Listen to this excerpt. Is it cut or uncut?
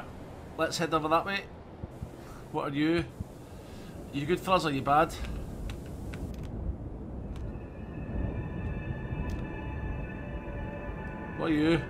uncut